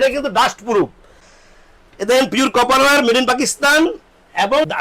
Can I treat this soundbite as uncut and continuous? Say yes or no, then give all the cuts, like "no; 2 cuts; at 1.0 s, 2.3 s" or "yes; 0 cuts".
no; 1 cut; at 1.2 s